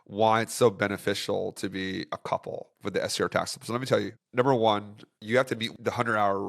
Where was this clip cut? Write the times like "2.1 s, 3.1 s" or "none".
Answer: 4.2 s, 5.7 s